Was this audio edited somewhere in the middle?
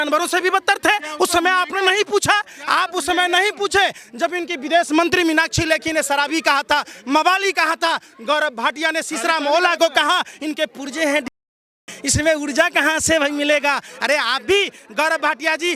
no; 0 cuts

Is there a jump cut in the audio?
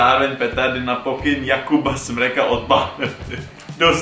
no; 0 cuts

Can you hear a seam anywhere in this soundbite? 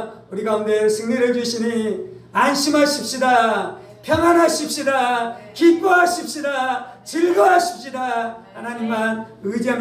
no; 0 cuts

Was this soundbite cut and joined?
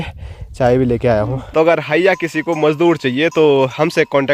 yes; 1 cut; at 1.4 s

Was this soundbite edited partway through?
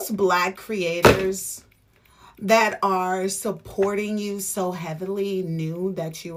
no; 0 cuts

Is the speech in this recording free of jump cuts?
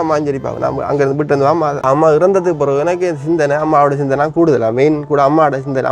no; 1 cut; at 1.8 s

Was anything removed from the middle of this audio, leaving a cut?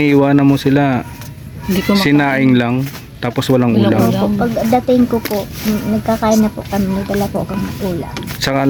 no; 0 cuts

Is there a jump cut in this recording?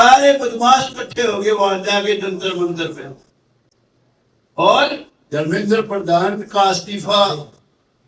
no; 0 cuts

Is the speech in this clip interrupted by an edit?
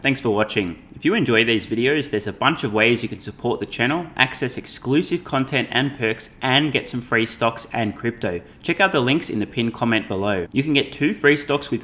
no; 0 cuts

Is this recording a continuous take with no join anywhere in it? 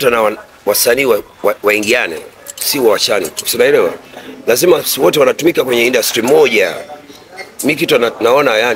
yes; 0 cuts

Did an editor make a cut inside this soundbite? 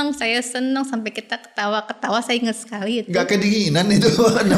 no; 0 cuts

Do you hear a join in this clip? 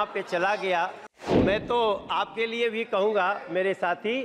yes; 1 cut; at 1.3 s

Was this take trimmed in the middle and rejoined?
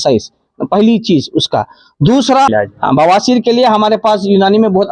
yes; 1 cut; at 2.5 s

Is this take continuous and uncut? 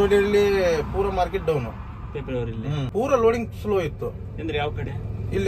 yes; 0 cuts

